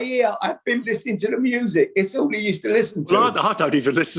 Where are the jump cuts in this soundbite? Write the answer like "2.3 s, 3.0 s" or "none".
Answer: 0.8 s, 3.0 s

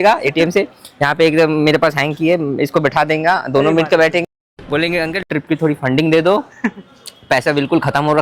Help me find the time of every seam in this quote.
none

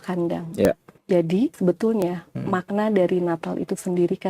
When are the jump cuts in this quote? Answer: 0.7 s, 1.5 s

